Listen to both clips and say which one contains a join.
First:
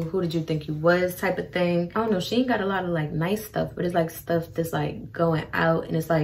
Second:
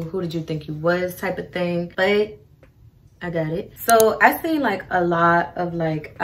first; 1 cut; at 1.9 s

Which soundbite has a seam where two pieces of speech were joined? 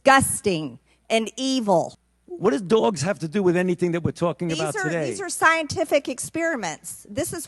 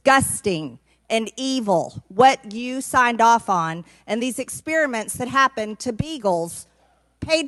first; 1 cut; at 2.0 s

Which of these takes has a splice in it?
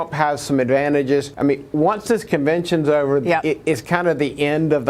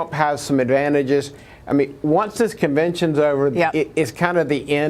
first; 1 cut; at 1.3 s

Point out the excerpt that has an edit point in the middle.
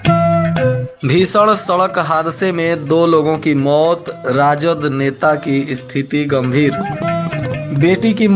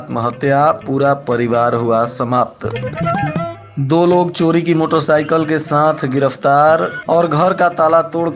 first; 1 cut; at 0.9 s

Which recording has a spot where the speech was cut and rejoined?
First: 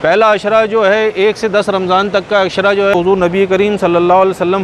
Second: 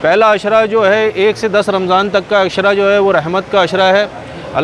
first; 1 cut; at 2.9 s

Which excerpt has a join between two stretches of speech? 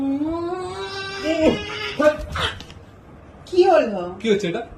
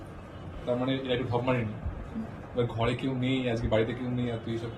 second; 1 cut; at 2.1 s

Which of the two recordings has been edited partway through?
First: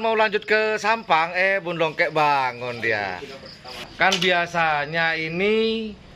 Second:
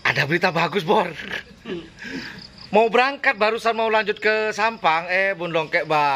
first; 1 cut; at 3.8 s

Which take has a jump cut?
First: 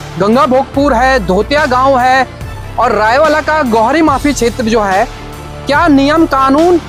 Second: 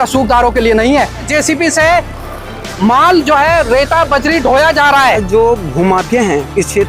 second; 2 cuts; at 1.3 s, 5.2 s

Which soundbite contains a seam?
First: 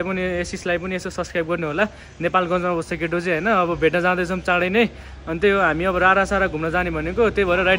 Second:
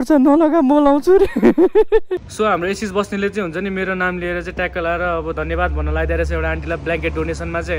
second; 1 cut; at 2.3 s

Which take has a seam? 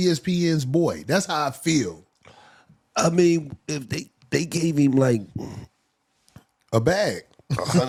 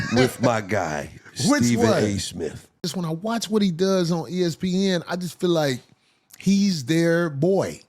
second; 1 cut; at 2.8 s

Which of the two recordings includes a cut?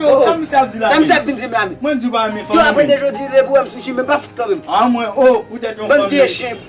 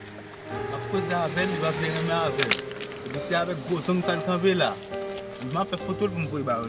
second; 1 cut; at 0.9 s

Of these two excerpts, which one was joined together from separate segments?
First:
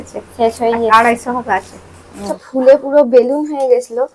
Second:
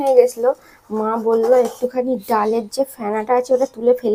first; 1 cut; at 2.4 s

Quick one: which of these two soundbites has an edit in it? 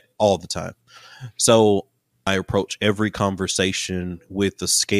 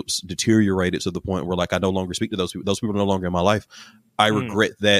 first; 1 cut; at 2.1 s

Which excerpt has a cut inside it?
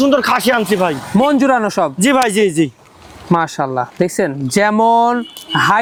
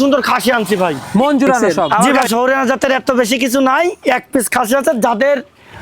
second; 1 cut; at 2.1 s

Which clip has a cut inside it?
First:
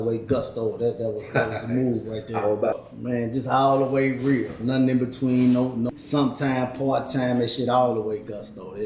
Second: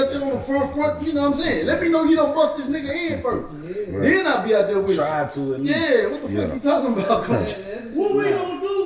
first; 2 cuts; at 2.8 s, 5.9 s

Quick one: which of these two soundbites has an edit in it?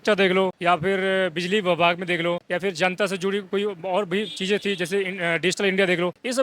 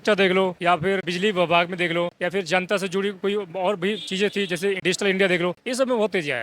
second; 2 cuts; at 1.0 s, 4.8 s

